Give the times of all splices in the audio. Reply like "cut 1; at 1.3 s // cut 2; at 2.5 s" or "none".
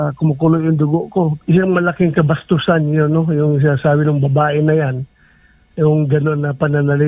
cut 1; at 1.4 s

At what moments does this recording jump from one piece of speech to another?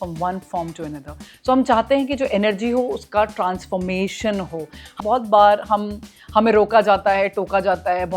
cut 1; at 4.9 s

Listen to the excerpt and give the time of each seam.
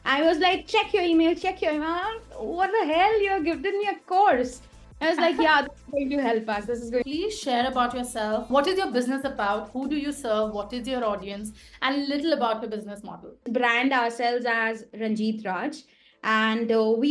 cut 1; at 7.1 s // cut 2; at 13.5 s

